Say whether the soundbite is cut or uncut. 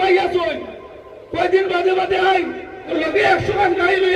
cut